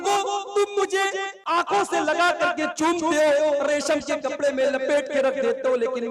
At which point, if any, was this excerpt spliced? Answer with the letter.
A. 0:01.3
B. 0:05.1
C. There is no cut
A